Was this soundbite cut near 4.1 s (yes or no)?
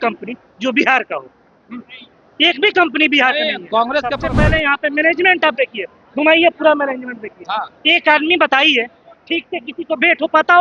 yes